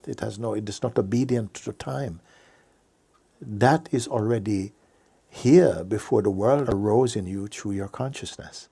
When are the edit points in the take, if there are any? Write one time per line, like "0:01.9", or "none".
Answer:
0:06.7